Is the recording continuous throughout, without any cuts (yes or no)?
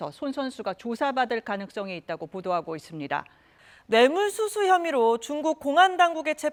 yes